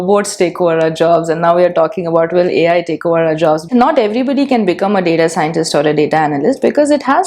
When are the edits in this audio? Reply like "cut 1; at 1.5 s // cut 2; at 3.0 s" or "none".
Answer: cut 1; at 3.6 s

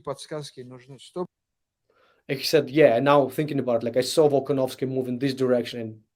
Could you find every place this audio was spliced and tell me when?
none

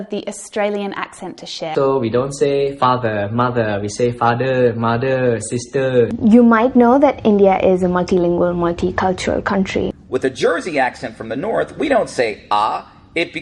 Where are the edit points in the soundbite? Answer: cut 1; at 1.7 s // cut 2; at 6.1 s // cut 3; at 9.9 s

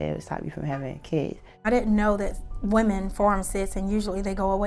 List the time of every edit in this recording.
cut 1; at 1.7 s

